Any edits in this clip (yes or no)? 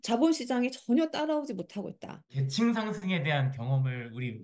yes